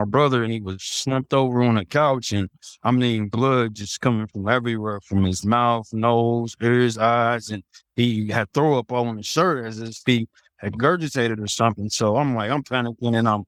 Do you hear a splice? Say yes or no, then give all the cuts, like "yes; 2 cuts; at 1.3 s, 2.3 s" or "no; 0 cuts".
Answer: no; 0 cuts